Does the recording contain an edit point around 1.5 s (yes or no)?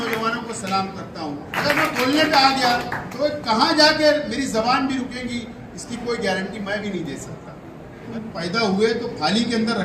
yes